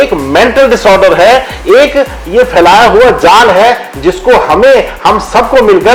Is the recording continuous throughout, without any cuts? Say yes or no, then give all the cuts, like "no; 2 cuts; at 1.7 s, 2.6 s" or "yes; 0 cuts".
yes; 0 cuts